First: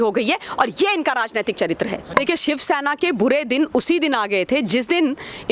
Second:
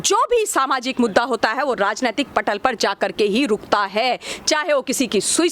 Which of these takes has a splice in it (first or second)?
first